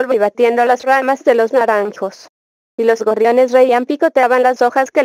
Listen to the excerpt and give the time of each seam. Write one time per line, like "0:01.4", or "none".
0:03.5